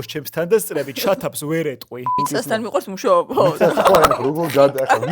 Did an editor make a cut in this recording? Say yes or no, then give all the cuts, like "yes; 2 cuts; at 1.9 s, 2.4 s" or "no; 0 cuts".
yes; 1 cut; at 2.2 s